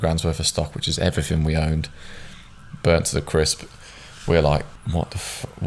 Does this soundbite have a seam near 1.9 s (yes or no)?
no